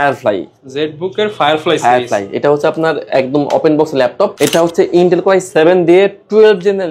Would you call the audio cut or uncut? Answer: uncut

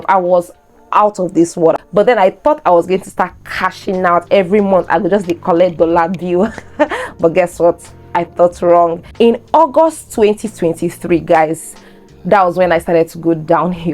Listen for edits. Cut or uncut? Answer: cut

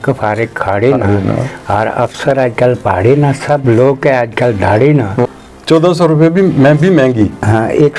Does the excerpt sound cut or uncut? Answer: cut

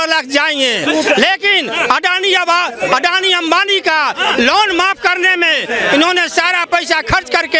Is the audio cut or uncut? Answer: uncut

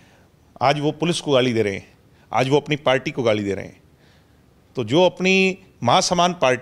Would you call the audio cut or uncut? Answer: uncut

